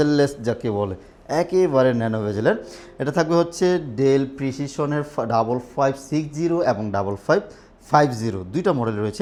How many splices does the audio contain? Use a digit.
0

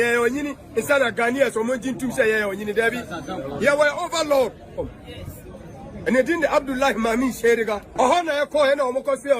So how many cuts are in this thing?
1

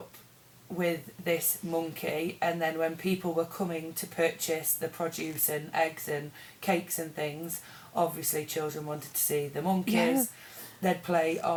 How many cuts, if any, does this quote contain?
0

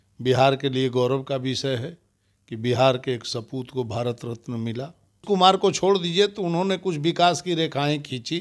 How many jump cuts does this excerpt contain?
1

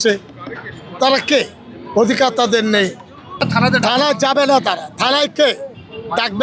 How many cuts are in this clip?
1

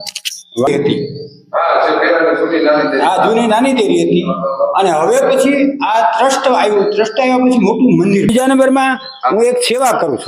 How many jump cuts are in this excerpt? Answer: 2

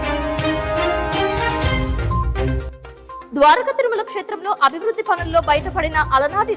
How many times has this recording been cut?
1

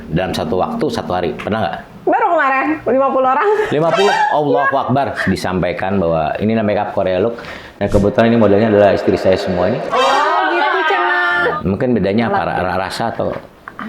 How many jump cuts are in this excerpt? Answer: 2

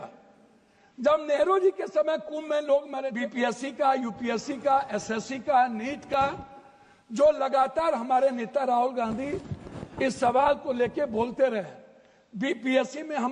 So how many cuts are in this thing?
1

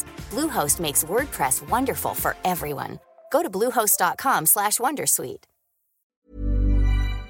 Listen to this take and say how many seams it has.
1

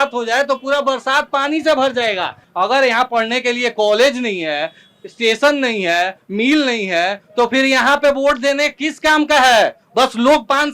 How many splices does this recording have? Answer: 1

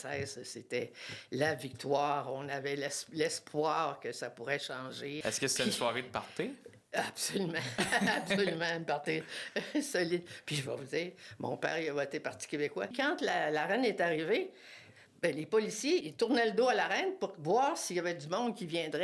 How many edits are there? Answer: 3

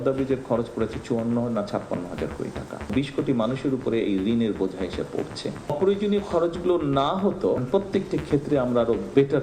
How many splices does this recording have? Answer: 3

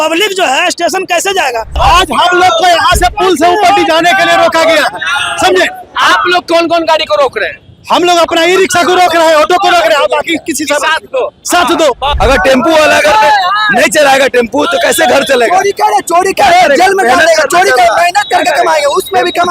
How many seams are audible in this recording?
2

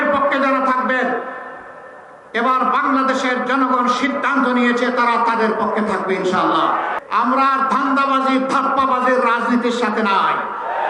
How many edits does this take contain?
1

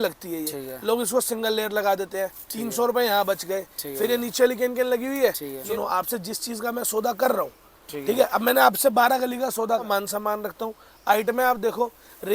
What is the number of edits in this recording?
2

